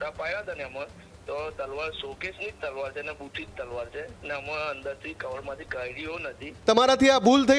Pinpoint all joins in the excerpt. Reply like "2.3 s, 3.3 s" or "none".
6.5 s